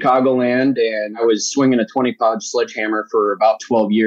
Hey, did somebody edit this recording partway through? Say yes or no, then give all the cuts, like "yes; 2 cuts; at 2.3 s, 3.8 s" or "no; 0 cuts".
yes; 1 cut; at 1.1 s